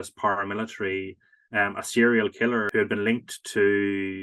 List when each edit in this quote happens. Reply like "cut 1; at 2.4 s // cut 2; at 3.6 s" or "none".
cut 1; at 2.7 s